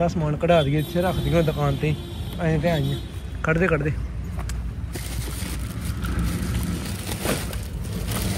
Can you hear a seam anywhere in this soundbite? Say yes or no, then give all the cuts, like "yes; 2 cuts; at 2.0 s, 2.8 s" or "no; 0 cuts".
no; 0 cuts